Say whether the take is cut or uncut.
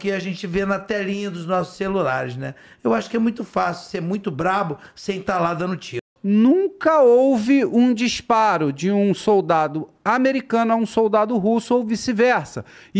cut